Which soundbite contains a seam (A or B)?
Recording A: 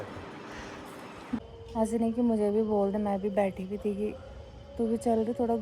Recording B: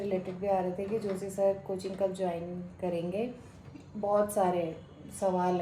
A